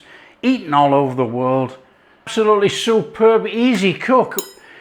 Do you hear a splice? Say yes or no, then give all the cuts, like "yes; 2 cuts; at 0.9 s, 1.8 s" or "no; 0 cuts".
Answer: yes; 1 cut; at 2.3 s